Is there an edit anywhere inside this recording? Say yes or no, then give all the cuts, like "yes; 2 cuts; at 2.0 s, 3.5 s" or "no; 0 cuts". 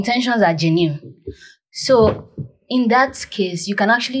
no; 0 cuts